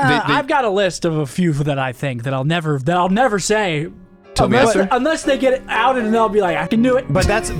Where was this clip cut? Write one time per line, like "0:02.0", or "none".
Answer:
0:06.7